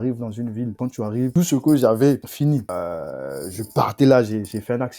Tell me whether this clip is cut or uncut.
cut